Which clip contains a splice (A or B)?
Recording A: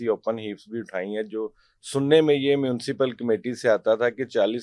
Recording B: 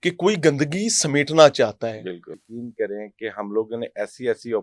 B